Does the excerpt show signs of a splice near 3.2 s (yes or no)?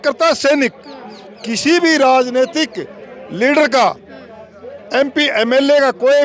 no